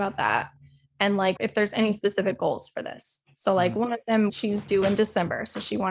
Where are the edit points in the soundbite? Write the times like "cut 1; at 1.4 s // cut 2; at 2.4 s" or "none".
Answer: cut 1; at 1.4 s // cut 2; at 4.3 s